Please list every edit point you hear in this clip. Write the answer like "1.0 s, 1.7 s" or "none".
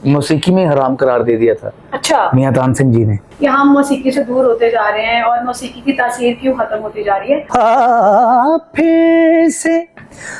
3.2 s, 7.4 s